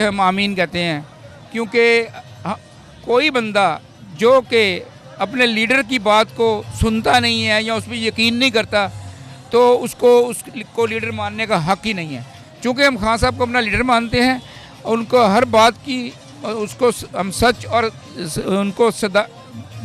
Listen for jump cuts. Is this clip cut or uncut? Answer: uncut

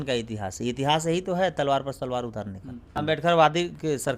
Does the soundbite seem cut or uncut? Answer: cut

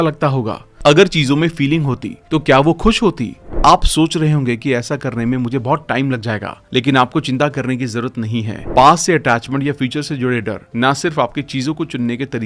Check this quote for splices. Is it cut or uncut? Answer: cut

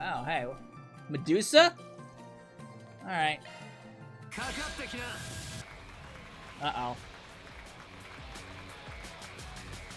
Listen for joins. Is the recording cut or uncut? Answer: cut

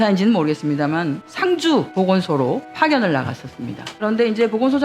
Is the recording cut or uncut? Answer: cut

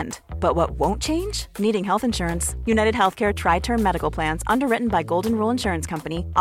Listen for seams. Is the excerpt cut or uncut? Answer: uncut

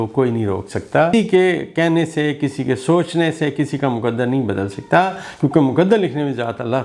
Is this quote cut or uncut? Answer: cut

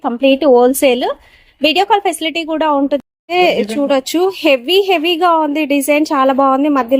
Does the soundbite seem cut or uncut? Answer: cut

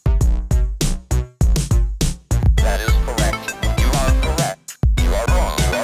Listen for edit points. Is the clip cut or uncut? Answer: uncut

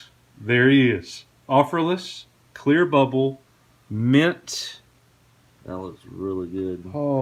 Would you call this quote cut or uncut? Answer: uncut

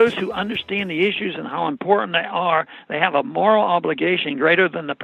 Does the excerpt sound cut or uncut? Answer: uncut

